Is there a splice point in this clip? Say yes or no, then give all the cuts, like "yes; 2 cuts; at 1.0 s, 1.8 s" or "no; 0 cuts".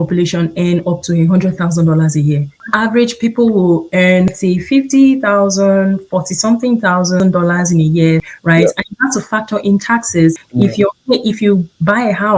yes; 5 cuts; at 2.6 s, 4.3 s, 7.2 s, 8.3 s, 10.4 s